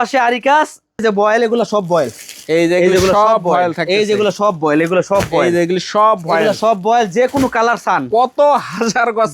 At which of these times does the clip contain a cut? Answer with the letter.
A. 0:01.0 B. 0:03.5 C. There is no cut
A